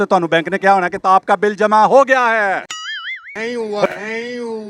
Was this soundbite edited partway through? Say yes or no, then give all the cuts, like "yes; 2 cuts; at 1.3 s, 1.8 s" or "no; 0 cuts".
no; 0 cuts